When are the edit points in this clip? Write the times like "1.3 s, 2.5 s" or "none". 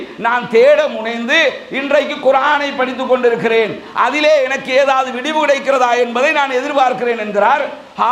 none